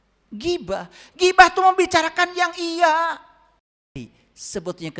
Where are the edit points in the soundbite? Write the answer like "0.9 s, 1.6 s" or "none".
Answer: 4.1 s